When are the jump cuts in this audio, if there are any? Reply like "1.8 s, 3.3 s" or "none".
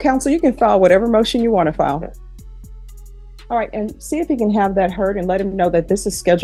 none